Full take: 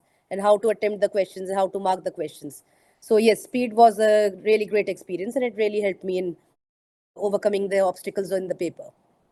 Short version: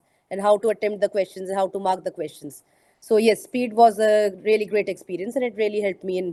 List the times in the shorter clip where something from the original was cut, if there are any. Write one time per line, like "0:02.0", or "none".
none